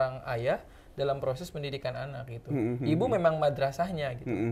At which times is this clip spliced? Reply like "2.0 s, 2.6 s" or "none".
none